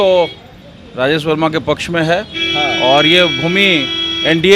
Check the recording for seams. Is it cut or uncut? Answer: uncut